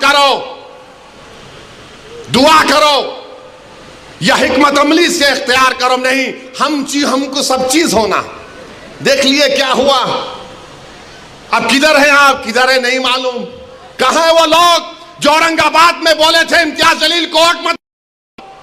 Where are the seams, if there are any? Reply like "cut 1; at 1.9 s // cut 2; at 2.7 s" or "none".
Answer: none

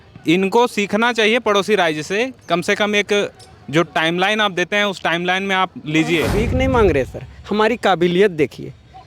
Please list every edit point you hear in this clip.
cut 1; at 6.4 s

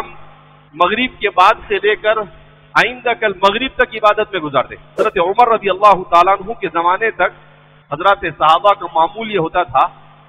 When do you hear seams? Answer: cut 1; at 5.0 s

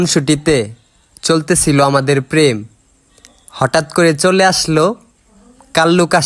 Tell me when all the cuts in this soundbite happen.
none

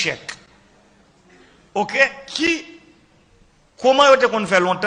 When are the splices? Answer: cut 1; at 1.9 s

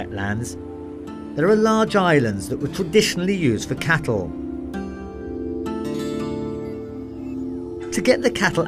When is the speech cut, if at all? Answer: cut 1; at 3.4 s

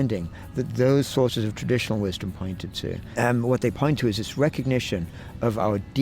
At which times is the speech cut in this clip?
cut 1; at 3.1 s

